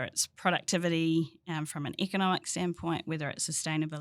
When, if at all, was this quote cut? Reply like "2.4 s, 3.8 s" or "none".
none